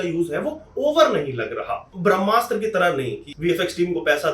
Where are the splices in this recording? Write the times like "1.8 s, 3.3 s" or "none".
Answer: 1.9 s, 3.2 s